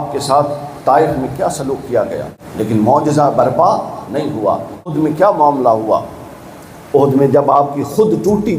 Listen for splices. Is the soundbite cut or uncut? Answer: cut